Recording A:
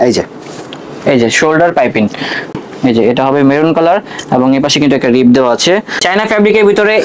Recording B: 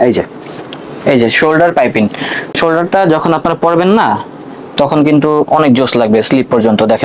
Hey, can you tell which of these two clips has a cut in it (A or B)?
A